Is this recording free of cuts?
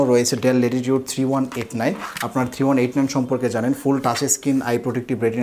yes; 0 cuts

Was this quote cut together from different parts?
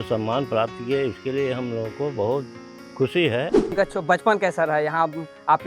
yes; 1 cut; at 3.7 s

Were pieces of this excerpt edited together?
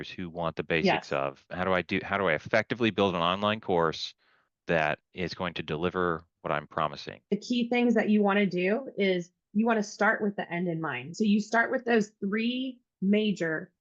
no; 0 cuts

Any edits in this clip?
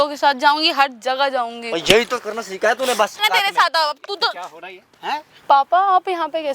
yes; 2 cuts; at 3.2 s, 5.3 s

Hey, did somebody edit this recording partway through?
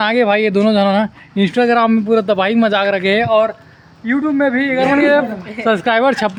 no; 0 cuts

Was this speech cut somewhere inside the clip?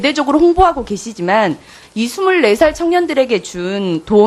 no; 0 cuts

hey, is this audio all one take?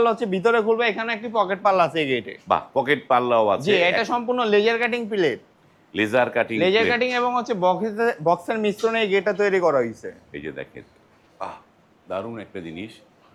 yes; 0 cuts

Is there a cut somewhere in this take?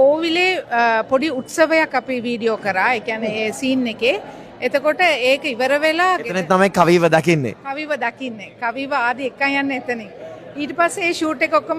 no; 0 cuts

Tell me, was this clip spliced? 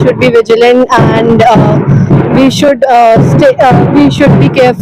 no; 0 cuts

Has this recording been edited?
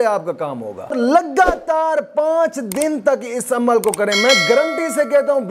yes; 1 cut; at 0.9 s

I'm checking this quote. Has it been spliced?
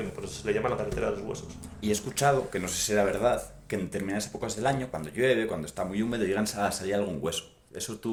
no; 0 cuts

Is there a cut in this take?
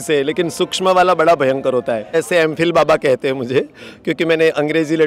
yes; 1 cut; at 2.1 s

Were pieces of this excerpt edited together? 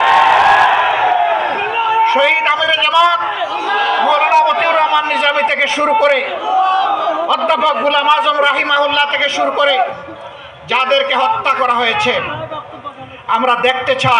no; 0 cuts

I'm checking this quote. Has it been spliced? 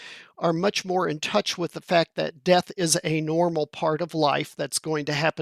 no; 0 cuts

